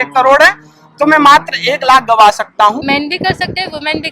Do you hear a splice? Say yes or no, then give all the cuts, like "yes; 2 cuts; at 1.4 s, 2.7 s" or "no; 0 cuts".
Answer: yes; 1 cut; at 2.8 s